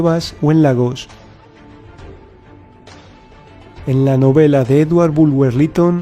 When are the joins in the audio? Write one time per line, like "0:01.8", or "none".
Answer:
0:03.7